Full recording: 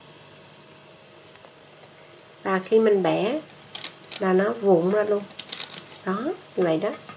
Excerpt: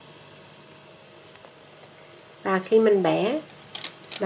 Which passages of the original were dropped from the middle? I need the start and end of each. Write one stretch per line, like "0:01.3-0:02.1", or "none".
none